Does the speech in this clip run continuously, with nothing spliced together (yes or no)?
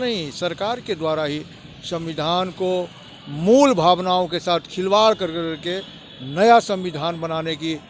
yes